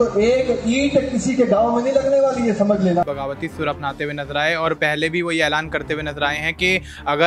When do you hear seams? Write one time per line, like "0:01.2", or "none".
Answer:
0:03.0